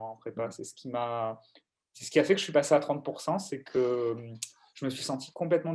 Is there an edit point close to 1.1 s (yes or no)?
no